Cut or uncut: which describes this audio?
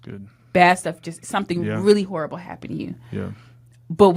uncut